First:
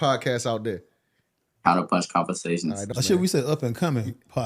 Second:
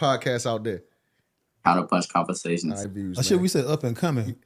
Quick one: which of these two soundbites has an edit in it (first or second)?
first